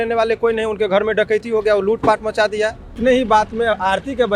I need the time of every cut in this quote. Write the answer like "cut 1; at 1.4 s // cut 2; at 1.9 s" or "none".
cut 1; at 2.9 s